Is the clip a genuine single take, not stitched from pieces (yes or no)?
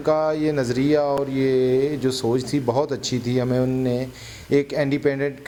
yes